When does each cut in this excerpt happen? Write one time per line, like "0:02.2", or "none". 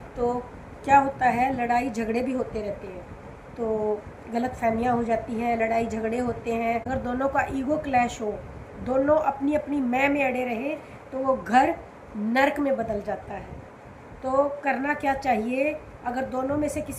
none